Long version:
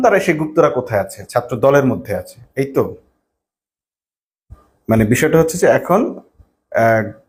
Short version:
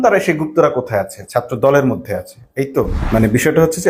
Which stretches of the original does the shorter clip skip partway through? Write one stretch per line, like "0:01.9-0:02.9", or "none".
0:03.0-0:04.7